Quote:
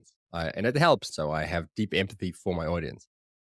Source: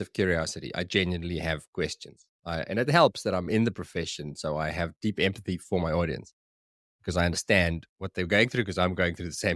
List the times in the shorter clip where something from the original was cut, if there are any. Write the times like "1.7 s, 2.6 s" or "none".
1.1 s